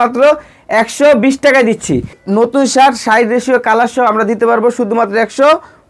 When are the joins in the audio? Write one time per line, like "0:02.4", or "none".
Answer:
0:02.2